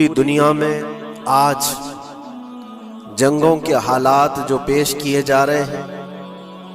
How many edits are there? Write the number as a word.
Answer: two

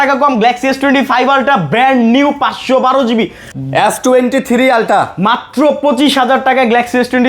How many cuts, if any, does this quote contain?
one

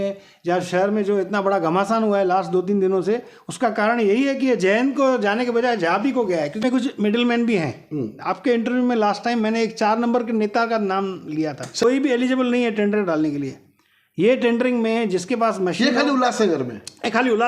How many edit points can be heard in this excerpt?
two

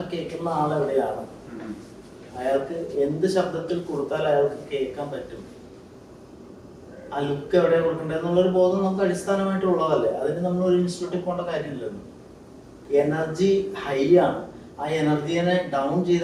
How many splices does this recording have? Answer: one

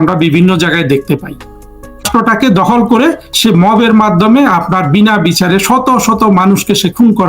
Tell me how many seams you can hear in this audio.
one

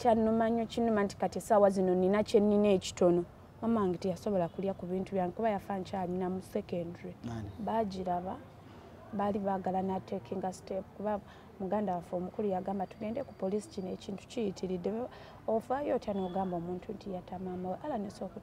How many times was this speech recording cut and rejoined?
one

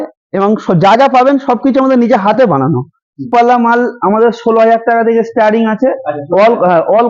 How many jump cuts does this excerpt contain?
one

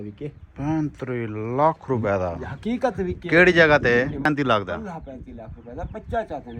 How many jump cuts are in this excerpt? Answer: one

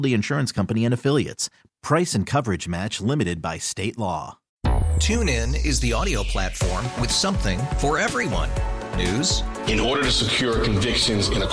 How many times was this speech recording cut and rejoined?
one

